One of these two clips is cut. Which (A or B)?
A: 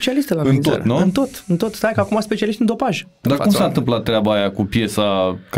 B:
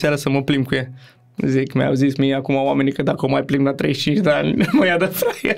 A